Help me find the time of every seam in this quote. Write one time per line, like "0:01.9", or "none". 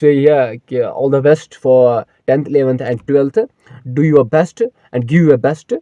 none